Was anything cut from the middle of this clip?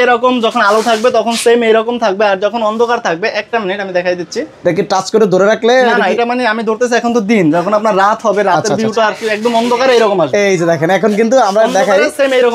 no; 0 cuts

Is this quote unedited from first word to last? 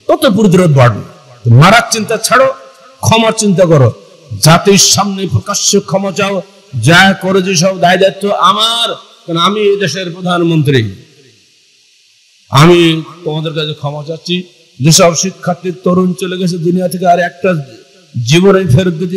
yes; 0 cuts

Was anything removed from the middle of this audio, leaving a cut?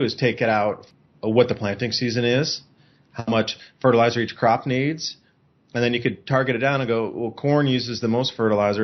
yes; 1 cut; at 0.9 s

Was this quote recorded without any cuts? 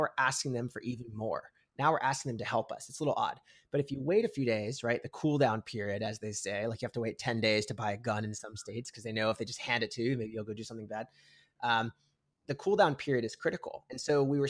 yes; 0 cuts

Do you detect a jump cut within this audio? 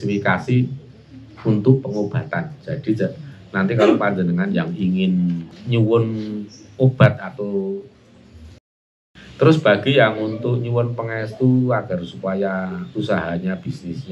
yes; 2 cuts; at 5.5 s, 9.0 s

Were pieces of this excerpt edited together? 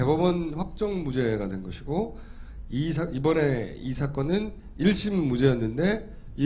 yes; 1 cut; at 2.1 s

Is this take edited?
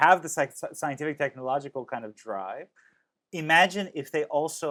no; 0 cuts

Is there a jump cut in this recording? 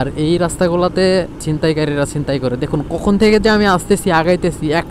yes; 1 cut; at 1.4 s

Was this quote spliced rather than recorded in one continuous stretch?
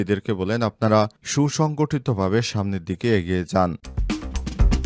yes; 1 cut; at 3.9 s

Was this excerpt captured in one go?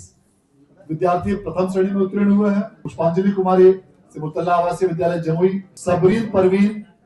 no; 2 cuts; at 2.8 s, 5.7 s

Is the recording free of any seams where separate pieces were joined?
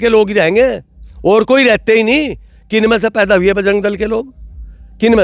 yes; 0 cuts

